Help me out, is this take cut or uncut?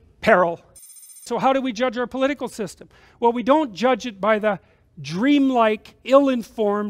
cut